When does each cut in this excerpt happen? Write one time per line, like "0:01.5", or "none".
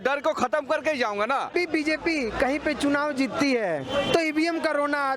0:01.5